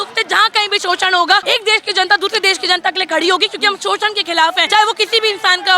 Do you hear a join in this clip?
yes; 2 cuts; at 1.4 s, 4.6 s

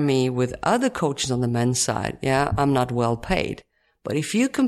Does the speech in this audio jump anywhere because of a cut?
no; 0 cuts

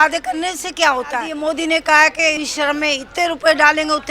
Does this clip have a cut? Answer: yes; 2 cuts; at 1.3 s, 2.4 s

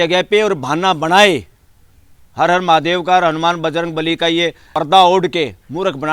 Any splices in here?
yes; 1 cut; at 4.6 s

